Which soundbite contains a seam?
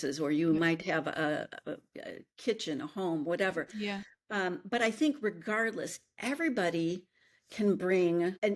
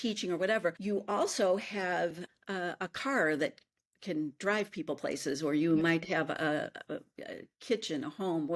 second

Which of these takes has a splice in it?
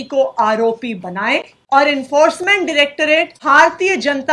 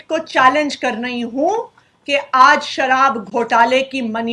first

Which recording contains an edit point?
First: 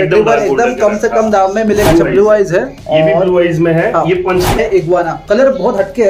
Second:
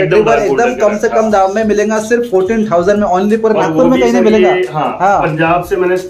first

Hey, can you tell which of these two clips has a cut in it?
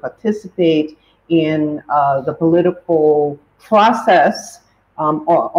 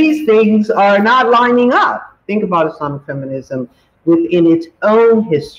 second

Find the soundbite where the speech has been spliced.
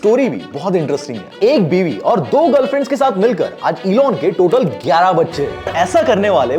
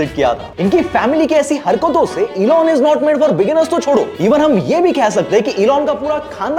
first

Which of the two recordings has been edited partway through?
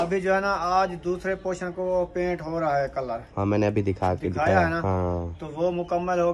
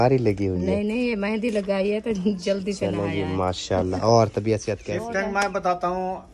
second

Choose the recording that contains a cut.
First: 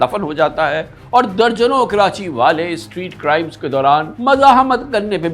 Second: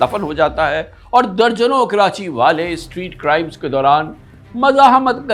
first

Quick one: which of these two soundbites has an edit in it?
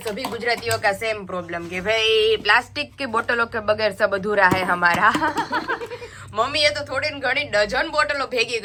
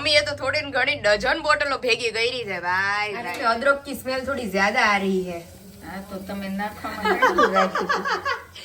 second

